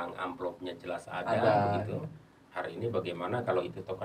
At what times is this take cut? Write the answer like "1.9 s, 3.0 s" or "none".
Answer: none